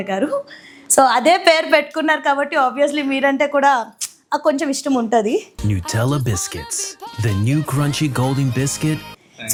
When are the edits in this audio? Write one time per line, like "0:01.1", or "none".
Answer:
none